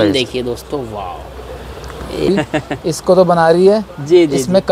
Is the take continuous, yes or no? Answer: no